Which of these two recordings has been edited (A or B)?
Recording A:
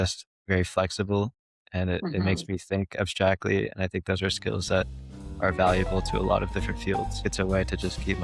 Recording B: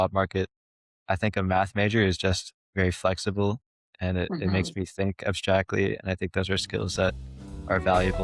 A